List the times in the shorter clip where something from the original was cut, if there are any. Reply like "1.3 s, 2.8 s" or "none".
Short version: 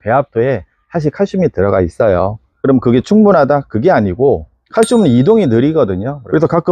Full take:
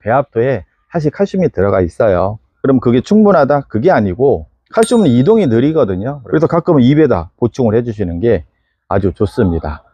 none